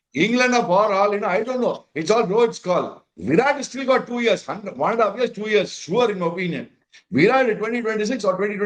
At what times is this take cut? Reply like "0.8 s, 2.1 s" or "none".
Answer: none